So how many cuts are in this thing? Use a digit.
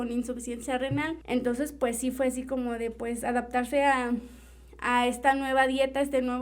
1